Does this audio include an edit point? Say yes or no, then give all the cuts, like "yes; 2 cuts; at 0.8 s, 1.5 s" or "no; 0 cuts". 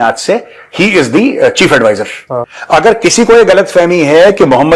yes; 1 cut; at 2.4 s